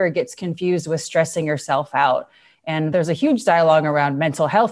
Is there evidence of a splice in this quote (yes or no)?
yes